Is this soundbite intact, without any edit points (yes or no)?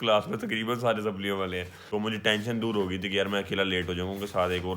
no